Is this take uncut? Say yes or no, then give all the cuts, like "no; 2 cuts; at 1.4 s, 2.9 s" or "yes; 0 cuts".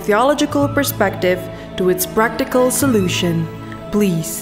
yes; 0 cuts